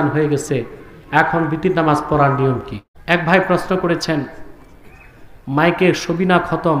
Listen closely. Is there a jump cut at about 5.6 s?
no; 1 cut; at 2.9 s

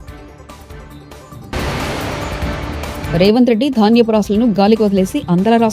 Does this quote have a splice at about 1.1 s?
no; 1 cut; at 3.1 s

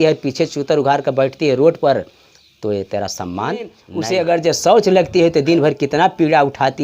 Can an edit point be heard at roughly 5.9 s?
no; 1 cut; at 3.9 s

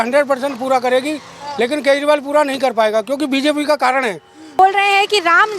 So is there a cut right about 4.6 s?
yes; 1 cut; at 4.6 s

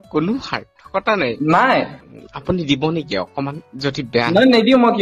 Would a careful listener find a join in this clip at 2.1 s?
yes; 1 cut; at 2.1 s

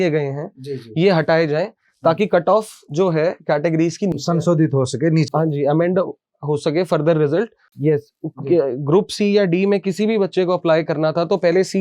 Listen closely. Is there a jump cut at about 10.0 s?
no; 1 cut; at 7.7 s

